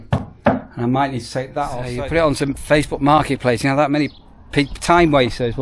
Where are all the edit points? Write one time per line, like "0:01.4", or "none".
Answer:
0:01.9